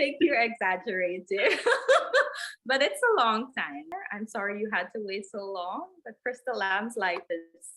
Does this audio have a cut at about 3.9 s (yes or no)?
yes